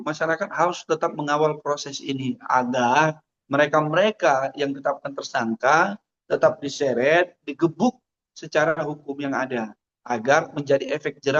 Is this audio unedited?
yes; 0 cuts

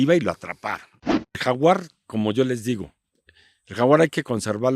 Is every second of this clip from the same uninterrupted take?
no; 1 cut; at 1.4 s

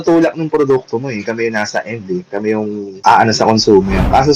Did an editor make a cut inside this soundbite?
no; 0 cuts

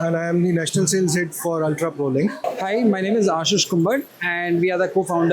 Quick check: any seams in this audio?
yes; 1 cut; at 2.4 s

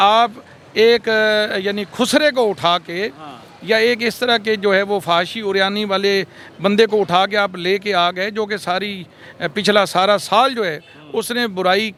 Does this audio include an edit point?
no; 0 cuts

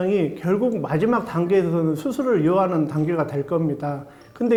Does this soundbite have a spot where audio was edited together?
no; 0 cuts

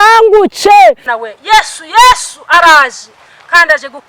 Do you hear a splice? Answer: yes; 1 cut; at 1.1 s

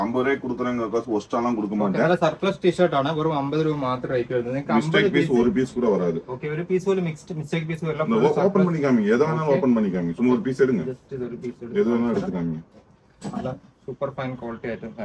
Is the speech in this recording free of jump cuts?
yes; 0 cuts

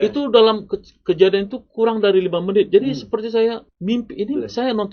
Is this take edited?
no; 0 cuts

